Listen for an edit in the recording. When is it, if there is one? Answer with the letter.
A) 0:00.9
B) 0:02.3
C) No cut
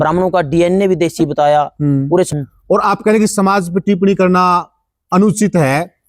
B